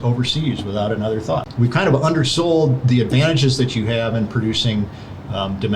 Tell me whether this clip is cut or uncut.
cut